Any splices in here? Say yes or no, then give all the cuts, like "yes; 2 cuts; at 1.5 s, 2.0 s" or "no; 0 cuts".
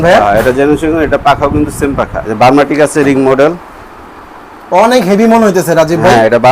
yes; 1 cut; at 2.2 s